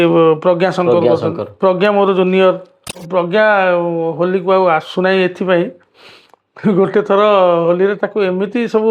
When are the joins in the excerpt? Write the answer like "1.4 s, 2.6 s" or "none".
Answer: 3.0 s